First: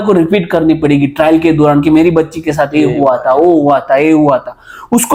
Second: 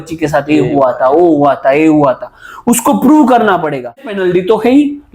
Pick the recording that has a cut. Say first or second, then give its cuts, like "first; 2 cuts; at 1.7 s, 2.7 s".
second; 1 cut; at 4.1 s